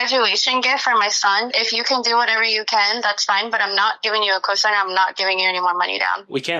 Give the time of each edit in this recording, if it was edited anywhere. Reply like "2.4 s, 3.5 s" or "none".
none